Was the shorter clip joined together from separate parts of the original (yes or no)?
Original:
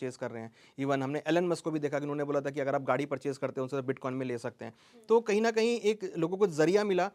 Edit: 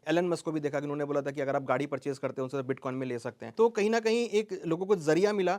yes